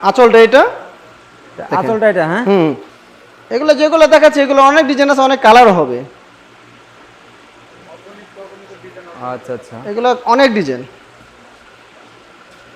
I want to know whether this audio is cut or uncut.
cut